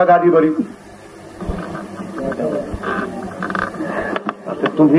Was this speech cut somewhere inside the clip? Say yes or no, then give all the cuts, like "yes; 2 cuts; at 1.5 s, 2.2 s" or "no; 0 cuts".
yes; 1 cut; at 1.4 s